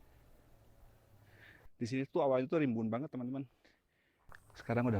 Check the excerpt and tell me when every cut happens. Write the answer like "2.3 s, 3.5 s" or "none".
1.7 s